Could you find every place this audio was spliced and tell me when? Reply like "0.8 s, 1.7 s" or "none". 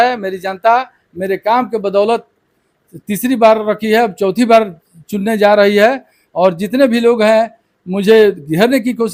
none

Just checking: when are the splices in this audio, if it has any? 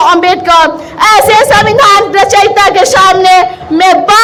none

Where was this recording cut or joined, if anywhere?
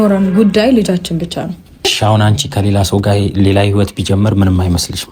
1.9 s

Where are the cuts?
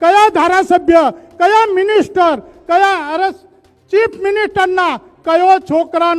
none

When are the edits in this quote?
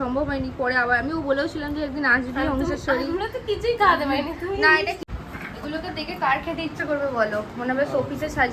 5.0 s

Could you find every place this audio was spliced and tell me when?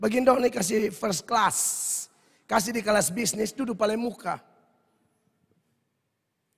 none

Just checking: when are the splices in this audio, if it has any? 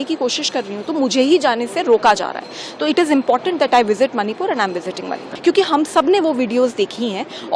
5.2 s

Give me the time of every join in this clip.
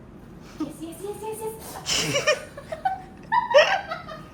none

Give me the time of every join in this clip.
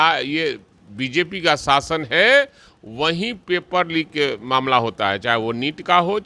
none

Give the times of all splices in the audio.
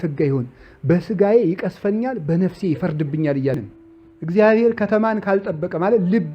3.6 s

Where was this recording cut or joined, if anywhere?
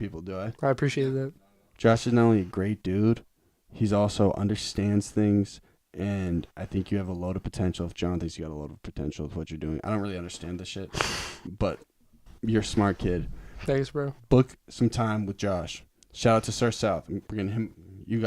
none

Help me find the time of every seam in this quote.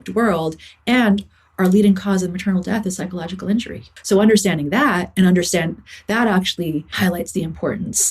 3.9 s, 6.9 s

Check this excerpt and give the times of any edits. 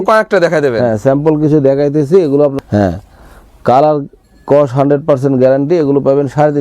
2.6 s

